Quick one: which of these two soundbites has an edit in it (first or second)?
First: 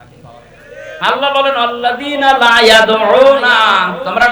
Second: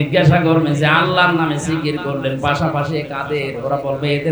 first